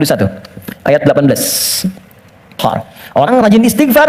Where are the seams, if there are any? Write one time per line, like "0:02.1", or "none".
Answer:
0:02.6